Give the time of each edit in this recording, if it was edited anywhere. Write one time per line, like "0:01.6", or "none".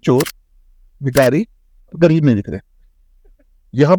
none